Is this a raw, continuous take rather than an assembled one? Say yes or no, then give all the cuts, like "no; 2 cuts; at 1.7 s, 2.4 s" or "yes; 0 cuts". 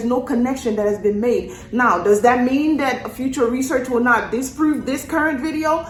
yes; 0 cuts